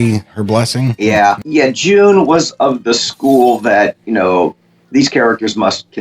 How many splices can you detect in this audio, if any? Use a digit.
1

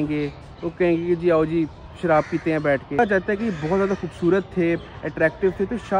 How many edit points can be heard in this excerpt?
1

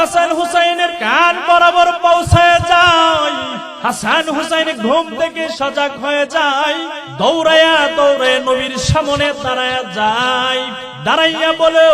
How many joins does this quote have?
4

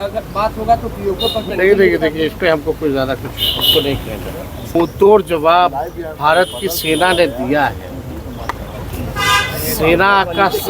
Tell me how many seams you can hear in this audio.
2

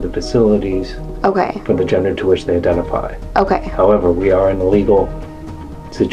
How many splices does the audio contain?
0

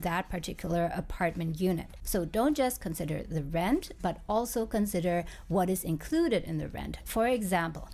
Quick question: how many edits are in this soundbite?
0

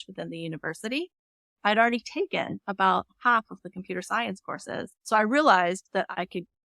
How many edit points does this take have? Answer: 2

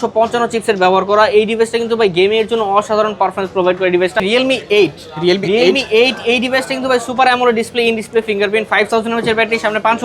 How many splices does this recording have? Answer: 1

